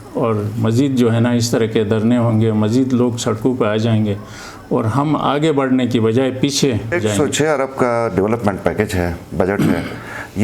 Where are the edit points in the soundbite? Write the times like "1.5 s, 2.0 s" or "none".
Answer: 6.9 s